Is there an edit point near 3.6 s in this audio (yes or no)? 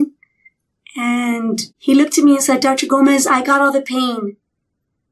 no